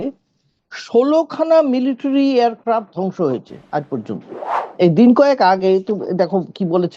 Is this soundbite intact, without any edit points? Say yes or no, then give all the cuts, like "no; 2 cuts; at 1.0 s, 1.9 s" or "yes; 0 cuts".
no; 1 cut; at 4.6 s